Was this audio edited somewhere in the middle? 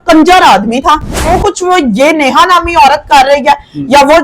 yes; 1 cut; at 1.3 s

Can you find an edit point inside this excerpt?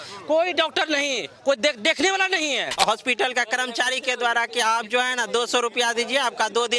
yes; 1 cut; at 2.7 s

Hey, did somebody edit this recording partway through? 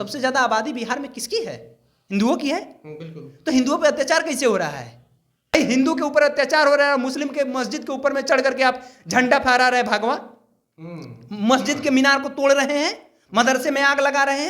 yes; 1 cut; at 5.5 s

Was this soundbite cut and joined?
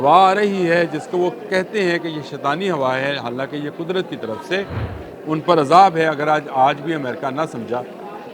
no; 0 cuts

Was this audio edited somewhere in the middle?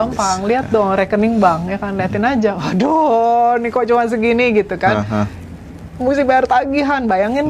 no; 0 cuts

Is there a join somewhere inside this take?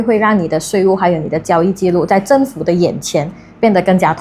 no; 0 cuts

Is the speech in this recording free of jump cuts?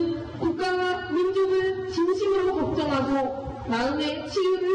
yes; 0 cuts

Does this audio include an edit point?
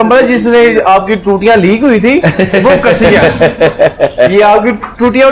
no; 0 cuts

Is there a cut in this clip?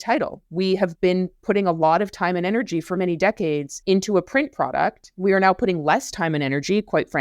yes; 3 cuts; at 0.9 s, 3.7 s, 5.0 s

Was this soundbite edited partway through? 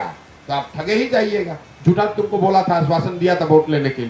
yes; 1 cut; at 1.7 s

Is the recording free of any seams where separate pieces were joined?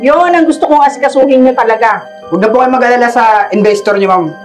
no; 1 cut; at 2.1 s

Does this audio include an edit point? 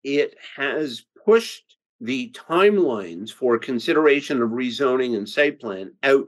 no; 0 cuts

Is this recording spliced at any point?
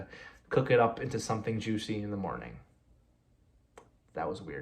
no; 0 cuts

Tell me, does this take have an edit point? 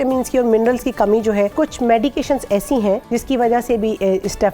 yes; 2 cuts; at 1.5 s, 3.0 s

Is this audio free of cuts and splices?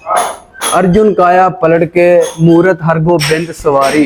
yes; 0 cuts

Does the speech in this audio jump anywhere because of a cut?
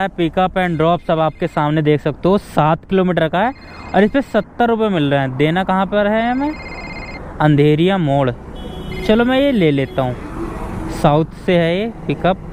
no; 0 cuts

